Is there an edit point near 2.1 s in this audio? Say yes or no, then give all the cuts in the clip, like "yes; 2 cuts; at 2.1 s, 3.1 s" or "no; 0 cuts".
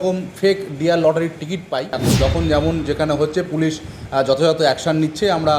yes; 1 cut; at 2.1 s